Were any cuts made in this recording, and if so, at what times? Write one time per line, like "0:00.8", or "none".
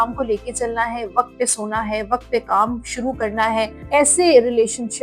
0:03.8